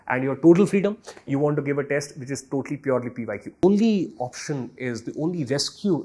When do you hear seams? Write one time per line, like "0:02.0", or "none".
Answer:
0:03.6